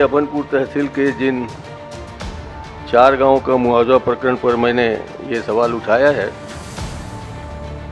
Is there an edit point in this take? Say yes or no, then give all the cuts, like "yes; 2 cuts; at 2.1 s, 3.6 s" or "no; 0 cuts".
no; 0 cuts